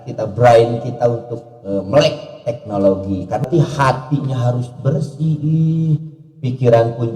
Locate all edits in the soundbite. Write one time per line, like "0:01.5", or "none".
0:03.4